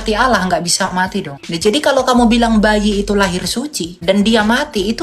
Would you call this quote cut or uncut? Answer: cut